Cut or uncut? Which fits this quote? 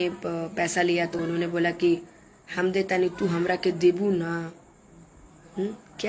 cut